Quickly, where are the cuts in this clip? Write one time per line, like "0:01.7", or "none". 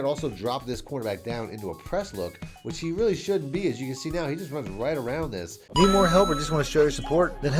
0:05.6